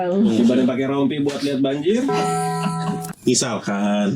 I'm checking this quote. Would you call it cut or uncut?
cut